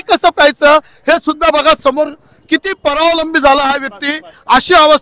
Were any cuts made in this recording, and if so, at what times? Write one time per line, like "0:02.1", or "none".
none